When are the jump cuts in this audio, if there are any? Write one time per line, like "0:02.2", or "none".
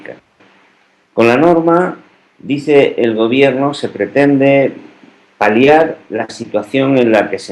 0:05.2